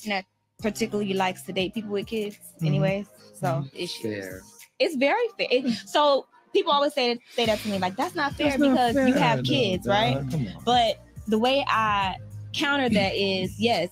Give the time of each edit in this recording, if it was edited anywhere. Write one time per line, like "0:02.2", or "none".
none